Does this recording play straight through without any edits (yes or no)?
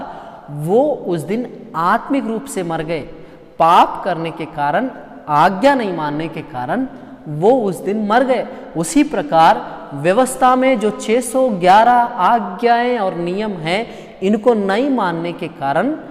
yes